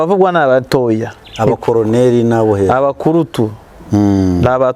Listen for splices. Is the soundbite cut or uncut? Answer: uncut